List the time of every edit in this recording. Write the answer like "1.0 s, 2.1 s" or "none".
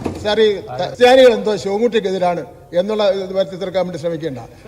0.9 s